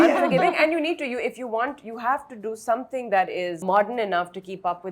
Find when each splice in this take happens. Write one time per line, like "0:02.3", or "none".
0:03.6